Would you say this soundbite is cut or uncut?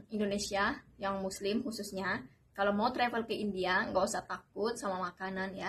uncut